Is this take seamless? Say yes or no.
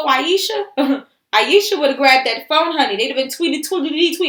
yes